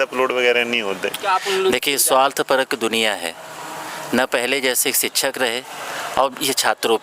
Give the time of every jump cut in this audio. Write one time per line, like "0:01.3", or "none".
0:01.1